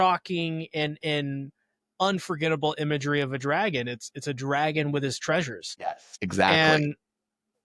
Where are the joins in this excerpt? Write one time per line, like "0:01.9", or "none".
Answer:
0:06.1